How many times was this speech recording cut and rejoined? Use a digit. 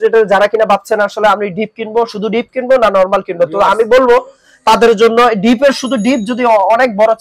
0